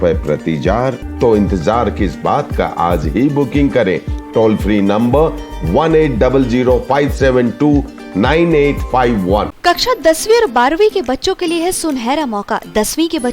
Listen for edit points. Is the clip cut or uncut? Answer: cut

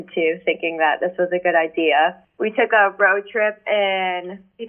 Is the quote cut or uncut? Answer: uncut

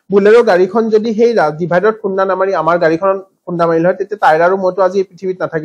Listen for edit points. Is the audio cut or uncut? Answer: uncut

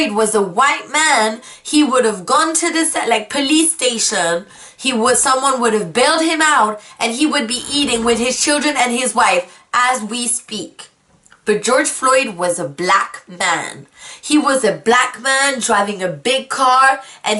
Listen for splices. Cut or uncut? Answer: uncut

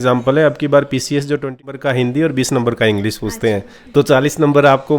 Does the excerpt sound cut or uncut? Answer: cut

